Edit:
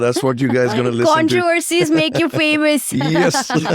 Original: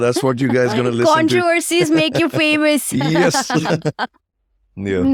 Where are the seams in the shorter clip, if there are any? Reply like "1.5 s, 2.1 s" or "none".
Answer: none